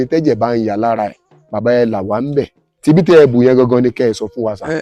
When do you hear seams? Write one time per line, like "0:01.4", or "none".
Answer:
none